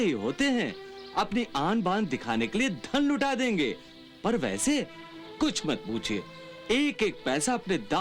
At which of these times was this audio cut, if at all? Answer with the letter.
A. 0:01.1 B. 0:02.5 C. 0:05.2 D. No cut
D